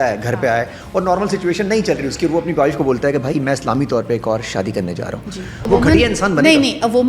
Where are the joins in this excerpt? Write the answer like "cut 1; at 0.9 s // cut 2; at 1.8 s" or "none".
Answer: cut 1; at 5.7 s